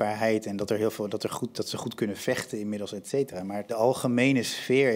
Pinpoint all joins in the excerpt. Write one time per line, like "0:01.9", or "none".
0:03.7